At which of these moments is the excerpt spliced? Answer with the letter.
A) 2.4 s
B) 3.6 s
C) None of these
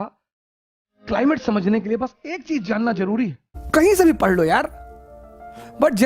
B